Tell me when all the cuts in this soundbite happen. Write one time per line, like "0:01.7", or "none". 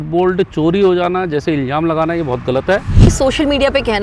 0:03.1